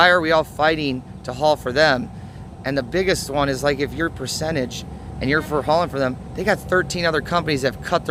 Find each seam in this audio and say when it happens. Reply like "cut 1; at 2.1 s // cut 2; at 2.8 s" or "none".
none